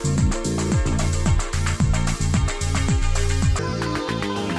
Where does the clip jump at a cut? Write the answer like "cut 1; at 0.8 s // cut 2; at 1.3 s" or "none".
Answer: cut 1; at 3.5 s